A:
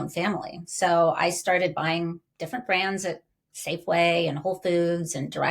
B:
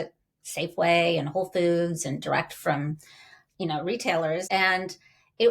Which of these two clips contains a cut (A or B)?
B